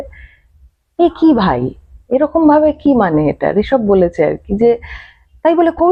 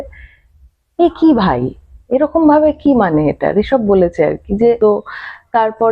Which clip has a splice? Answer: second; 1 cut; at 4.8 s

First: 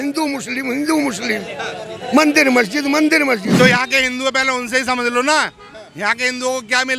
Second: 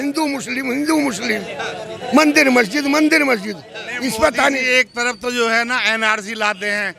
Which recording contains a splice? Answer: first; 1 cut; at 3.5 s

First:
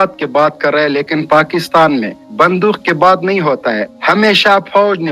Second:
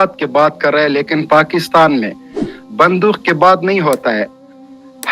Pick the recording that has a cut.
first; 2 cuts; at 2.2 s, 3.9 s

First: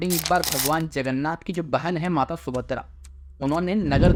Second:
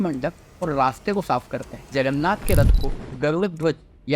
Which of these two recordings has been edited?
second; 1 cut; at 1.9 s

